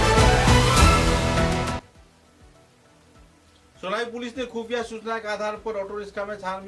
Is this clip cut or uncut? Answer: cut